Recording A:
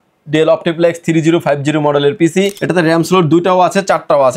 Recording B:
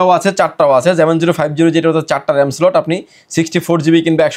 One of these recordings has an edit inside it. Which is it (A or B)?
A